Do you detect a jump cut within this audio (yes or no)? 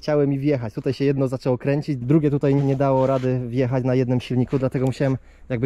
yes